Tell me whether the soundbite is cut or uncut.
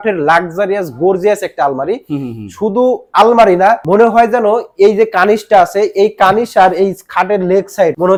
uncut